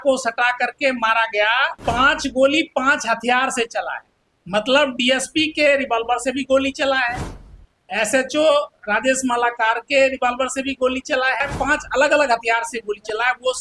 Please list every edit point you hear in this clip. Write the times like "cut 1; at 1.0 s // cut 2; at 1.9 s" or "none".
cut 1; at 1.7 s // cut 2; at 11.5 s